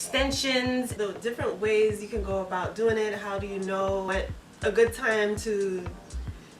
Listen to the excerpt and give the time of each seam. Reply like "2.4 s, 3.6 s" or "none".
0.9 s, 4.1 s